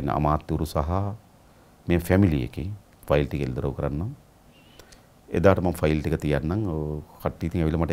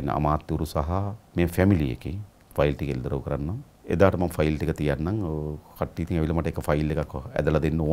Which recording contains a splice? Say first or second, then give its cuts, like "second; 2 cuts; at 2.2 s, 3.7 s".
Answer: second; 2 cuts; at 1.2 s, 3.7 s